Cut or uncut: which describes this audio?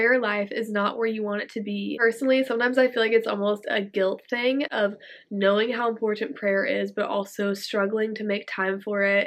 cut